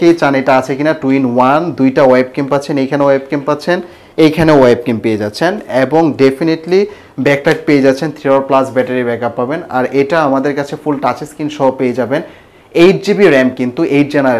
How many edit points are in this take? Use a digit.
0